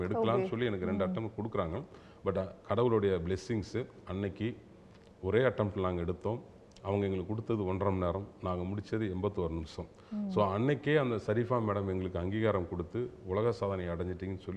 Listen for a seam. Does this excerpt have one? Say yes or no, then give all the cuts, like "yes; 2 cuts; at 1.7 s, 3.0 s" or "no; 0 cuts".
no; 0 cuts